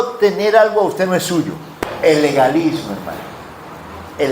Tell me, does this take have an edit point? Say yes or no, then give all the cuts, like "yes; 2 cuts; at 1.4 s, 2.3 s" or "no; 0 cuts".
yes; 1 cut; at 1.6 s